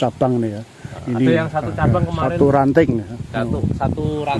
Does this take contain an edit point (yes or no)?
no